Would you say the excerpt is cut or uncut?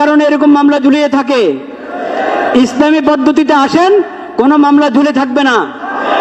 uncut